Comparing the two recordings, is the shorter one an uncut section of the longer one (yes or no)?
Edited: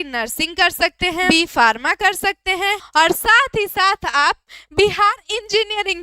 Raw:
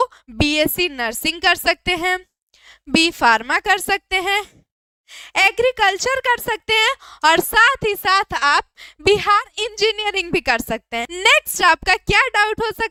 no